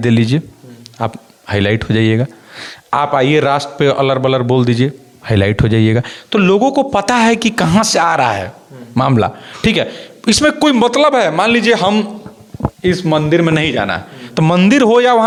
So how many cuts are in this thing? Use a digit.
0